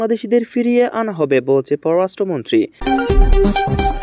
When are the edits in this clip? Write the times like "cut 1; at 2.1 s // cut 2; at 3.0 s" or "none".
cut 1; at 2.8 s